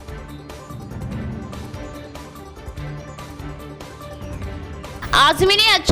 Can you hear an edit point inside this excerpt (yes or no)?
yes